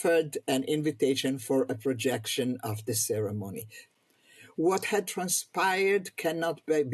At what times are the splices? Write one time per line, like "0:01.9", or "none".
0:03.8

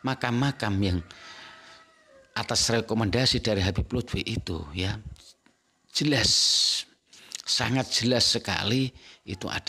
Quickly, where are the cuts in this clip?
none

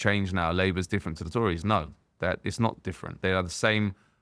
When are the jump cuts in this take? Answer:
0:03.0

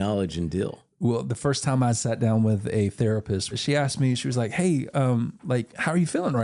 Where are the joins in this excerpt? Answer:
0:03.5

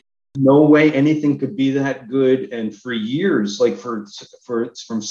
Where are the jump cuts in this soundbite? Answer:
none

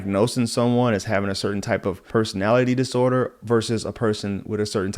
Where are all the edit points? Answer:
0:02.0

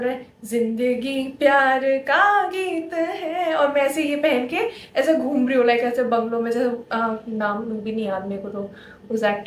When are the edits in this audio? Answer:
none

